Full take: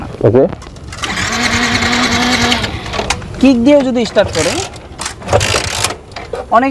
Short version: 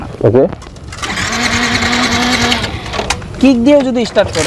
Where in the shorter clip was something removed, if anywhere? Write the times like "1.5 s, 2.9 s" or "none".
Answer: none